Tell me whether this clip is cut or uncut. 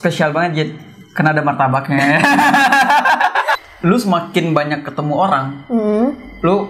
cut